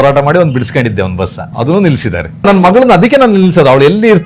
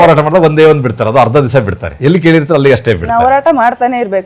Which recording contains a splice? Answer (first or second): first